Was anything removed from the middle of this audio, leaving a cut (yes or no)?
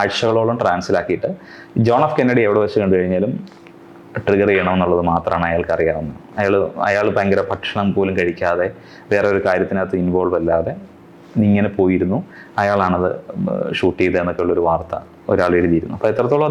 no